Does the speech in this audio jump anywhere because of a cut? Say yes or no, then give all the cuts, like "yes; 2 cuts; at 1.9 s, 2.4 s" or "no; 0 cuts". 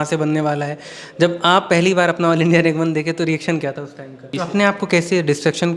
yes; 1 cut; at 4.3 s